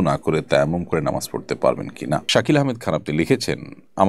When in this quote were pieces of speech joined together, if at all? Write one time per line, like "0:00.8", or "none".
0:02.3